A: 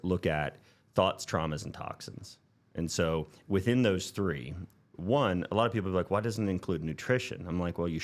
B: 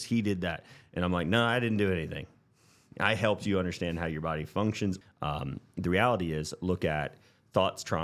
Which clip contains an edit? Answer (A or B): B